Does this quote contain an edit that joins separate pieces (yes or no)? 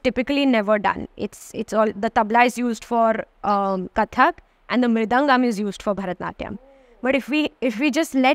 no